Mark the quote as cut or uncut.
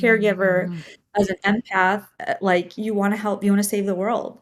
uncut